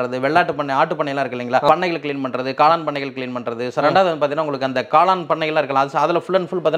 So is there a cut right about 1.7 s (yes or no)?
yes